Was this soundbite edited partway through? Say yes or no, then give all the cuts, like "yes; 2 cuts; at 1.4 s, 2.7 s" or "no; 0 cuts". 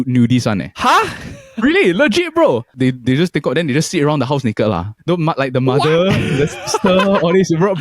yes; 2 cuts; at 2.7 s, 4.9 s